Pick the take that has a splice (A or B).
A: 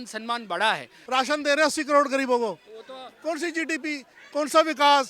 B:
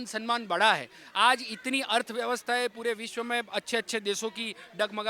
A